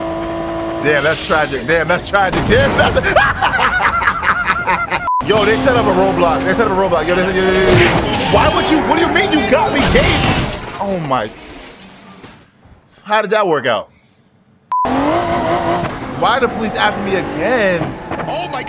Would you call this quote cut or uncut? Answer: cut